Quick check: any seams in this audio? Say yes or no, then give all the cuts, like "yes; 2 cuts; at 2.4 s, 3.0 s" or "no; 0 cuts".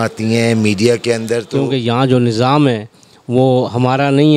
yes; 1 cut; at 1.5 s